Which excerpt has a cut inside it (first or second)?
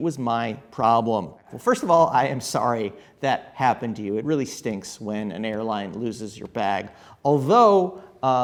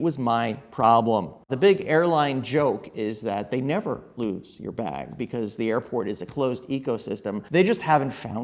second